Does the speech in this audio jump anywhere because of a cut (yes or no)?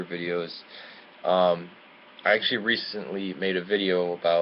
yes